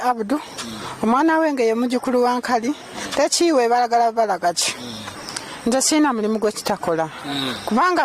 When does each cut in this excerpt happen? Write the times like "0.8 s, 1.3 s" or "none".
5.1 s